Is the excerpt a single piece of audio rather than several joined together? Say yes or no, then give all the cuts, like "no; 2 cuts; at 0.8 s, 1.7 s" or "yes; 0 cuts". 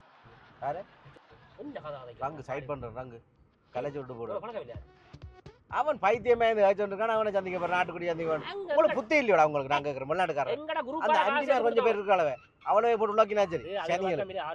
yes; 0 cuts